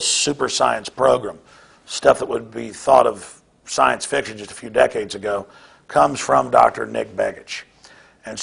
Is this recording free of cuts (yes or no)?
yes